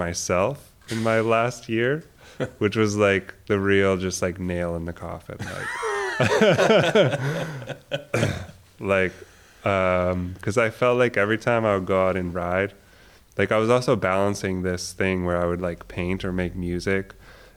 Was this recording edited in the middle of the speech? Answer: no; 0 cuts

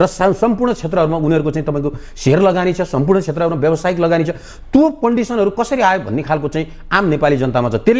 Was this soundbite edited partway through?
no; 0 cuts

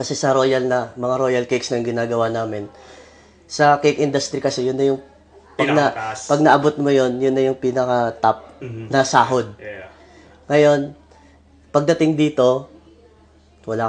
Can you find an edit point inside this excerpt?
no; 0 cuts

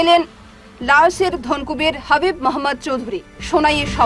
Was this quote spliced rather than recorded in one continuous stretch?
no; 0 cuts

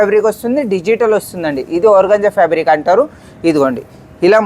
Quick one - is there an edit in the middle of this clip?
no; 0 cuts

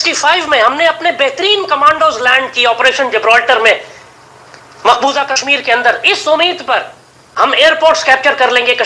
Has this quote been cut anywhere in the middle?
yes; 1 cut; at 7.2 s

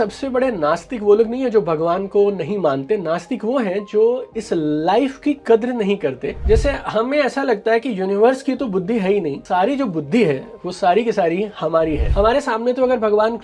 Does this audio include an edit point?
yes; 2 cuts; at 6.4 s, 12.1 s

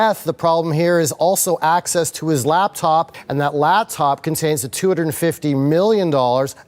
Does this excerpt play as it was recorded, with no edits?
yes; 0 cuts

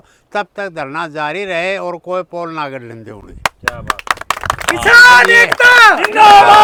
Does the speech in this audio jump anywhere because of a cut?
no; 0 cuts

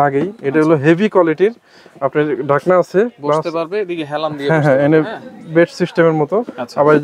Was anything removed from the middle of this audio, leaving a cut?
no; 0 cuts

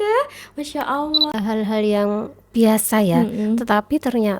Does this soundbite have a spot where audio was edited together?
yes; 1 cut; at 1.3 s

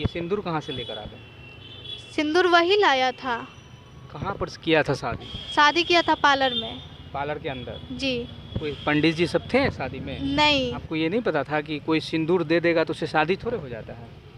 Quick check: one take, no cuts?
no; 1 cut; at 10.8 s

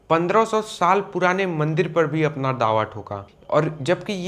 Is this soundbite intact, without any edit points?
yes; 0 cuts

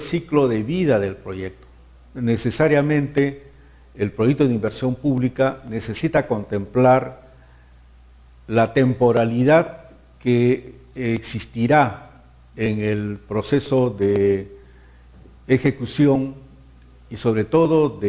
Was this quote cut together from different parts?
yes; 1 cut; at 5.1 s

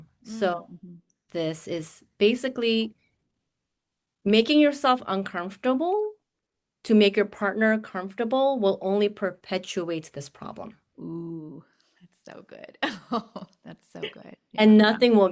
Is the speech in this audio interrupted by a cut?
yes; 1 cut; at 1.2 s

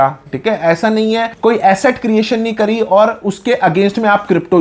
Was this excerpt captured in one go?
yes; 0 cuts

